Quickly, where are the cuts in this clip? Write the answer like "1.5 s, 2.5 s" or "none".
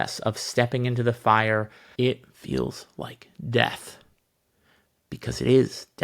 1.8 s